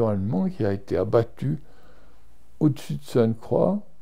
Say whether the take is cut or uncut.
uncut